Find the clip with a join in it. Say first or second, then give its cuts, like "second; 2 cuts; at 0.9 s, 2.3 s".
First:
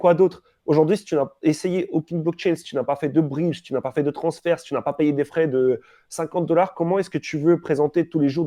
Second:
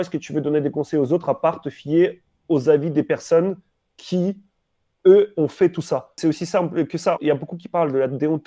second; 2 cuts; at 6.1 s, 7.2 s